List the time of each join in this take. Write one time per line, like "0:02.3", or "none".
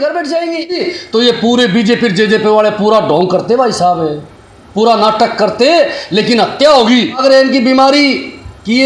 0:00.9
0:07.2